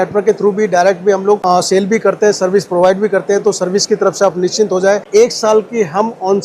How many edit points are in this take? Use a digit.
2